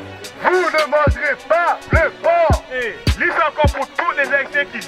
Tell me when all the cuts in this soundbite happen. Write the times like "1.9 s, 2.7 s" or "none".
none

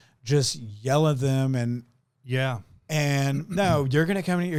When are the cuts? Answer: none

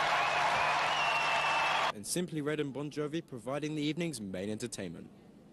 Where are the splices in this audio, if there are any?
3.7 s

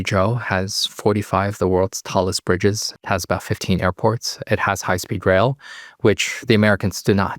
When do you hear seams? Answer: 2.9 s

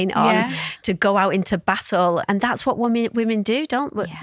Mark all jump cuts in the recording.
2.2 s

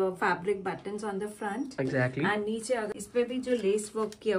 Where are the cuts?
2.9 s

